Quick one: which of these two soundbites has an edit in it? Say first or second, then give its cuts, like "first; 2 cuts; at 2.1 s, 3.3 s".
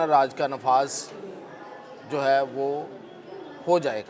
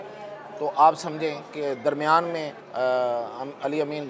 second; 1 cut; at 2.6 s